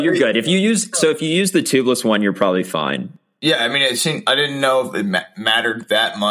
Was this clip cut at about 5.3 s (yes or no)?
no